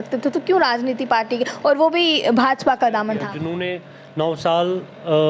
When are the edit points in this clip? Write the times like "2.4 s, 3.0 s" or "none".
3.4 s